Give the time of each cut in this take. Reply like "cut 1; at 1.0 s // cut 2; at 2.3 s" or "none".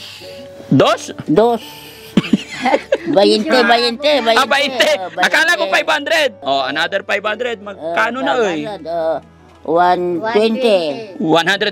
cut 1; at 6.4 s